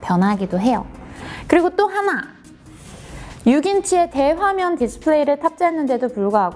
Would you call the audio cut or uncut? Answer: cut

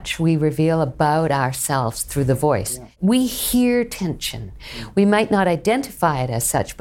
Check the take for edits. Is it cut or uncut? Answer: cut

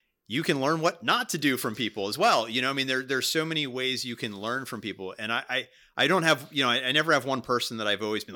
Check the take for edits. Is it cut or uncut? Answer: uncut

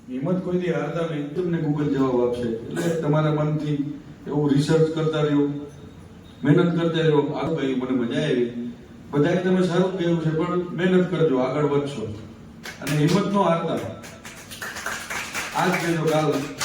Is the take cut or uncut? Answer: cut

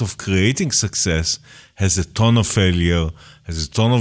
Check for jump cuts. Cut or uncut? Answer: uncut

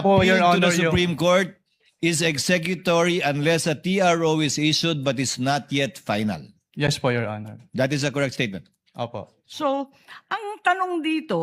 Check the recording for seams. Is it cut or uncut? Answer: cut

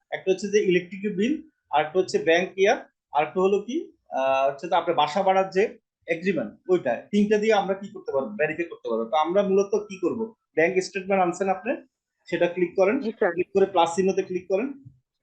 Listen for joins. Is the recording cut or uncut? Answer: uncut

